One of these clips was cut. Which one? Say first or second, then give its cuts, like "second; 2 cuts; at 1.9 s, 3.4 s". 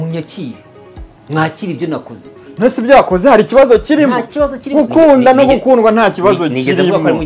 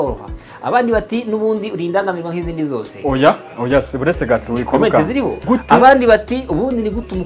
second; 1 cut; at 5.3 s